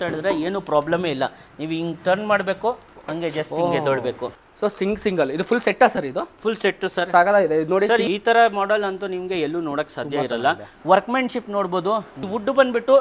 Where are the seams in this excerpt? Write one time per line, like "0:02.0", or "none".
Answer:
0:04.3
0:08.1
0:10.7

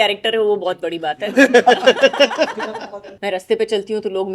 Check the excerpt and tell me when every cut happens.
0:03.0

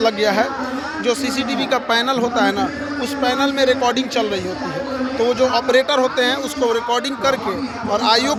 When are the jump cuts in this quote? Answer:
none

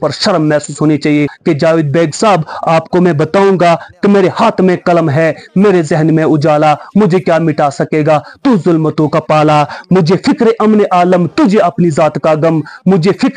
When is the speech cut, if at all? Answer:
0:01.3

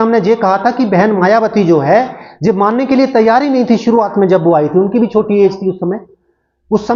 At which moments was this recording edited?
none

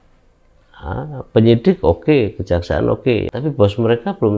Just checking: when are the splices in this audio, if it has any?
0:03.3

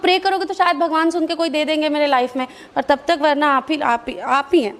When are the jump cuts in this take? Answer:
none

